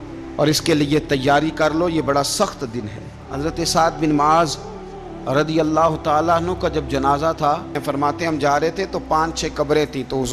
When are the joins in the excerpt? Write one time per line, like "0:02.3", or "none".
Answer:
0:03.2
0:07.8